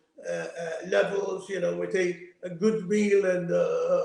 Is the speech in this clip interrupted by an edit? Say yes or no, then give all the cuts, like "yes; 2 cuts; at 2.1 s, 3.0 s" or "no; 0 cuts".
no; 0 cuts